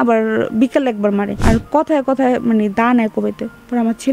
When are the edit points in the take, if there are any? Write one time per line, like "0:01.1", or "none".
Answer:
0:01.4